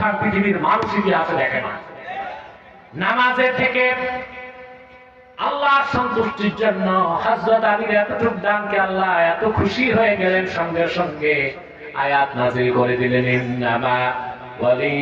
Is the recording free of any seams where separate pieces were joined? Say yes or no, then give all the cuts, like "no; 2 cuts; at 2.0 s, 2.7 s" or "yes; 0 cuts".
no; 1 cut; at 2.6 s